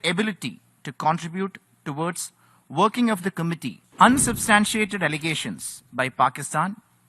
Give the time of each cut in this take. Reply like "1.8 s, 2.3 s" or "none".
3.8 s